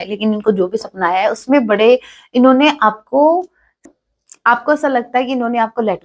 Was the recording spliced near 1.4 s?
no; 1 cut; at 3.9 s

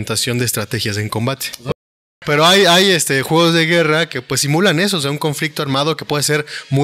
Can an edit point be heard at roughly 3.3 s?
no; 1 cut; at 1.7 s

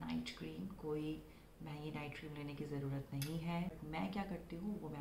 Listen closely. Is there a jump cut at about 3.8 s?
yes; 1 cut; at 3.8 s

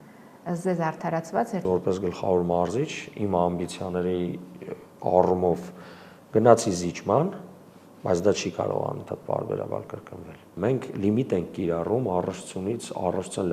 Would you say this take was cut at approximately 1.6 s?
yes; 2 cuts; at 1.6 s, 10.4 s

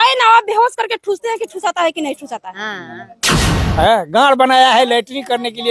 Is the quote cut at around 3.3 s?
yes; 1 cut; at 3.3 s

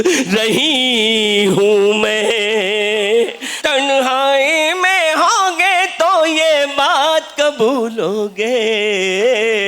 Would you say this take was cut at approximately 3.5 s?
yes; 1 cut; at 3.5 s

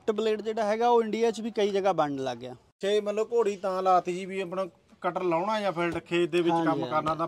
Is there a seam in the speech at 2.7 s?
yes; 1 cut; at 2.7 s

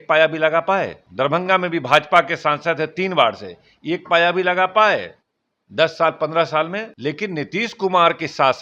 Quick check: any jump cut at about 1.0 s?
yes; 2 cuts; at 1.0 s, 6.9 s

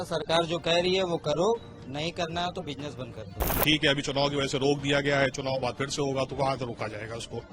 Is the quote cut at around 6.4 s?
no; 1 cut; at 3.5 s

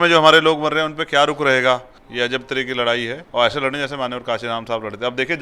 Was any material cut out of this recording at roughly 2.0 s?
yes; 2 cuts; at 2.0 s, 3.2 s

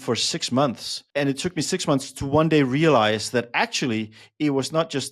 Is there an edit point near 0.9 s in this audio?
yes; 1 cut; at 0.9 s

